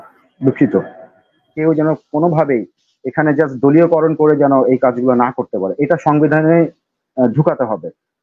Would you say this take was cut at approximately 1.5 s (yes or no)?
yes